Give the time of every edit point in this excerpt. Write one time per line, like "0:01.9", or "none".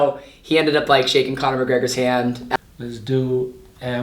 0:02.6